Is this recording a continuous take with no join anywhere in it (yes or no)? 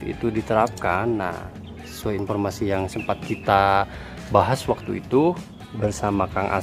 yes